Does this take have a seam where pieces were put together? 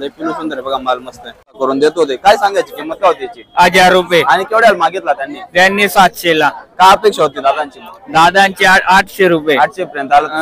yes; 1 cut; at 1.6 s

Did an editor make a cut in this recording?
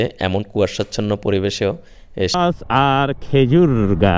yes; 1 cut; at 2.3 s

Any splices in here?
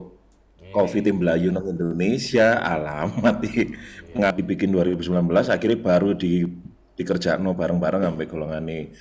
yes; 1 cut; at 4.3 s

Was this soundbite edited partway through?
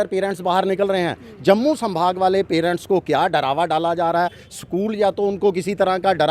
no; 0 cuts

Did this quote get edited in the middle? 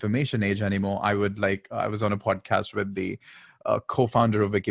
no; 0 cuts

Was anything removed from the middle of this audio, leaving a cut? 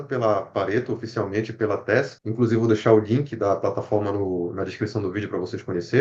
yes; 1 cut; at 2.2 s

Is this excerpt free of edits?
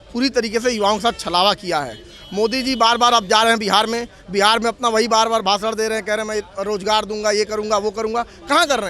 yes; 0 cuts

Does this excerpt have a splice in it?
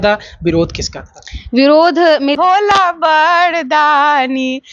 yes; 1 cut; at 2.4 s

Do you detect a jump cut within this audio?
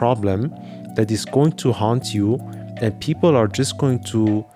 no; 0 cuts

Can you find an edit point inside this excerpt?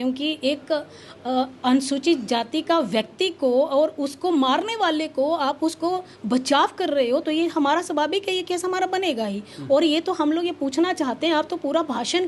no; 0 cuts

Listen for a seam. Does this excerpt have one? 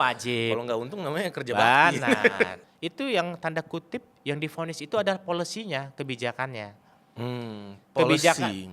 yes; 1 cut; at 2.6 s

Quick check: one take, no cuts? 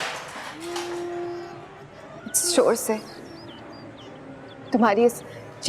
no; 1 cut; at 1.5 s

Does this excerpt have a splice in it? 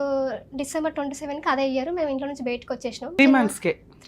yes; 1 cut; at 3.2 s

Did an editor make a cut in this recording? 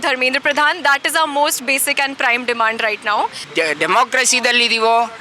yes; 1 cut; at 3.4 s

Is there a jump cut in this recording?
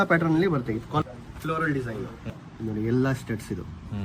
yes; 2 cuts; at 1.0 s, 2.2 s

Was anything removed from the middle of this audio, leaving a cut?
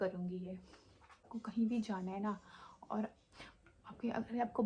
yes; 1 cut; at 1.3 s

